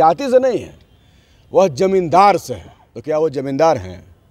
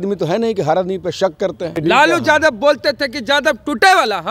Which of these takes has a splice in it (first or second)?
second